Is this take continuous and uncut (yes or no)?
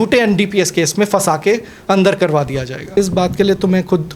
no